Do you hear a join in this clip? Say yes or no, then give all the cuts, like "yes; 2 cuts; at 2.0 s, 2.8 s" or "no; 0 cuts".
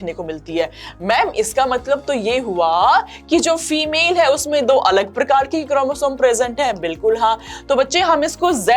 no; 0 cuts